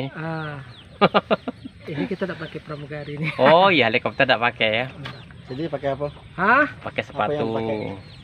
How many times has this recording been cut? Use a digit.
0